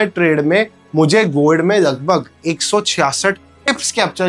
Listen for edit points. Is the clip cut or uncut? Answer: uncut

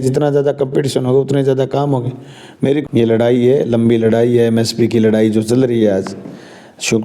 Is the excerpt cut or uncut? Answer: cut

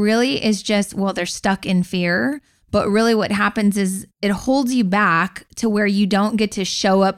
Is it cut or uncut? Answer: uncut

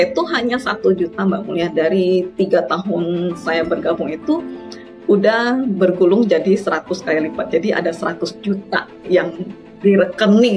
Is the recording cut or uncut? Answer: uncut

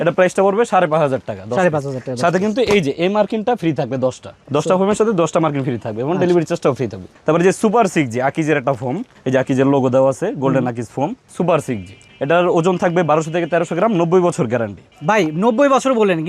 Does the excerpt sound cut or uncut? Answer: uncut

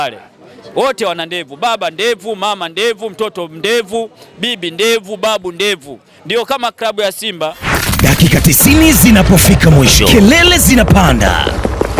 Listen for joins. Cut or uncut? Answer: cut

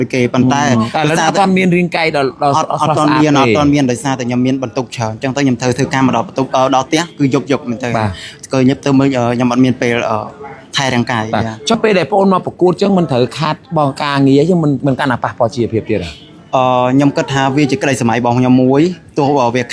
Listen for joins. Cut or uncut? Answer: uncut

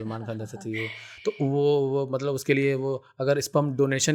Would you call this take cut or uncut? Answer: uncut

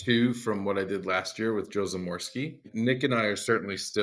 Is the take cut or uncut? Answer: cut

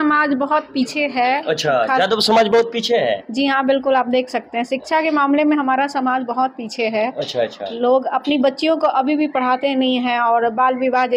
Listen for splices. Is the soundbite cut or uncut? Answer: uncut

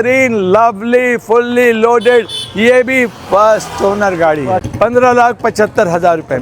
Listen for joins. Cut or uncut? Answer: cut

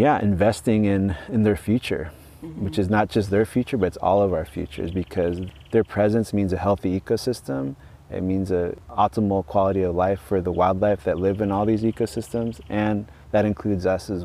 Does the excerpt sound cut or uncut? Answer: cut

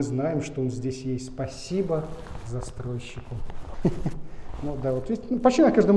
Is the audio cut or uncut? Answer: uncut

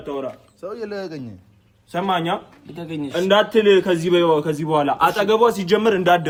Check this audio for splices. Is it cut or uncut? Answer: uncut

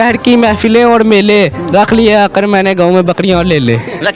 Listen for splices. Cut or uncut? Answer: uncut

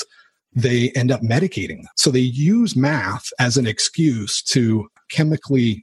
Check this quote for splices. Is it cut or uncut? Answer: cut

